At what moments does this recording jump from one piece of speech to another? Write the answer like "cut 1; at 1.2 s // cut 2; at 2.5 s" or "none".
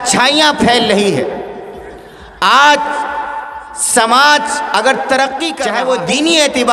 cut 1; at 5.6 s

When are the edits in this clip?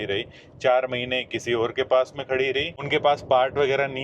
cut 1; at 2.8 s

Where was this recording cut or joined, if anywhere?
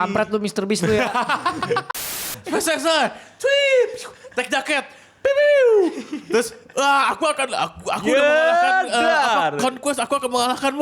cut 1; at 2.1 s

